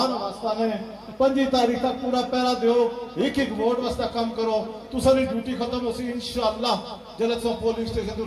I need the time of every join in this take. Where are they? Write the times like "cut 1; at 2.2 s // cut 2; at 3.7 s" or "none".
none